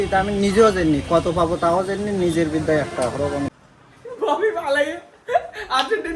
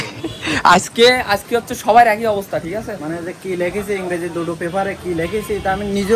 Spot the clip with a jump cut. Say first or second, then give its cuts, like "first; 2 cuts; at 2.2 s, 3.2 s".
first; 1 cut; at 3.6 s